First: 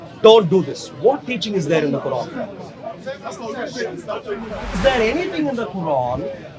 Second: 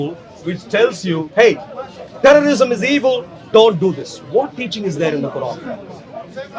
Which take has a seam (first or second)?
first